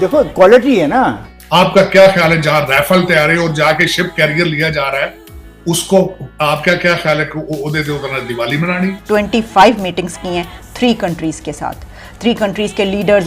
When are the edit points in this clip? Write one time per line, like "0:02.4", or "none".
0:01.2
0:09.0
0:12.1